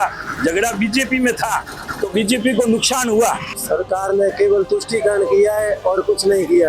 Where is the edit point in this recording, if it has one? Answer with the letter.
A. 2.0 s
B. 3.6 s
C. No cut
B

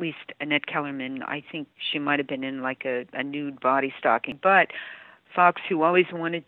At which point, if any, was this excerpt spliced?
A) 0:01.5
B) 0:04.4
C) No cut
B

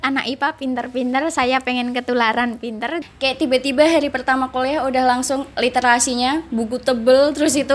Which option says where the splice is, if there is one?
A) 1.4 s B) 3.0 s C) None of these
B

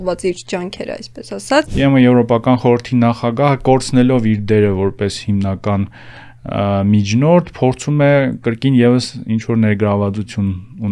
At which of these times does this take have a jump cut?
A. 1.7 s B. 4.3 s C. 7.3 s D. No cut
A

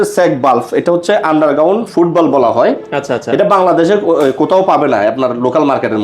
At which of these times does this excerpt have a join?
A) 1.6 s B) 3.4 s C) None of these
C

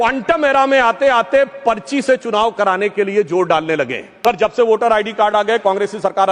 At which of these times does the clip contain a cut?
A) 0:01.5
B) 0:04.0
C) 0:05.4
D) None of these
B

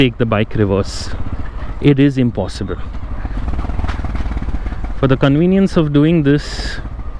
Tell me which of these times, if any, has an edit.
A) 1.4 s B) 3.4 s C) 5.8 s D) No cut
B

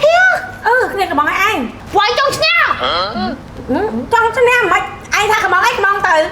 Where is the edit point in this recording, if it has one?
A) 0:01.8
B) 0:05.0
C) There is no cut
A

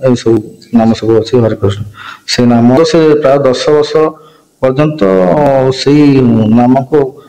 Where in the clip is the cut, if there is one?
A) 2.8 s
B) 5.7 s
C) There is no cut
A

